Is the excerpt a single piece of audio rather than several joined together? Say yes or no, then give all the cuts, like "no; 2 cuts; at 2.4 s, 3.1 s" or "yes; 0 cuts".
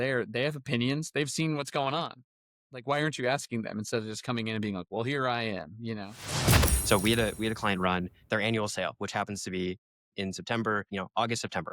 no; 2 cuts; at 2.8 s, 6.6 s